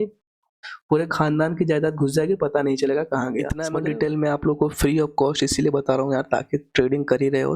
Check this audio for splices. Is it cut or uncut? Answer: cut